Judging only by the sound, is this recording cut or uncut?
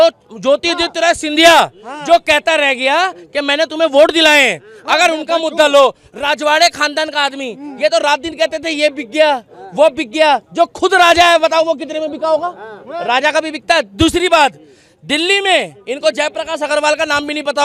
uncut